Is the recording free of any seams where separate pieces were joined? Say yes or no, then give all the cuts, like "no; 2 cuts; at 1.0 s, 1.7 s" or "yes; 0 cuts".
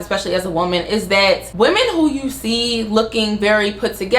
no; 1 cut; at 1.5 s